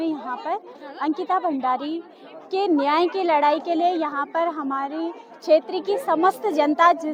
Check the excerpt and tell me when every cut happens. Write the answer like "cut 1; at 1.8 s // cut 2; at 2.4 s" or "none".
none